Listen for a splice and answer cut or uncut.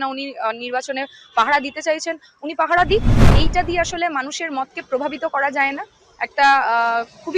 cut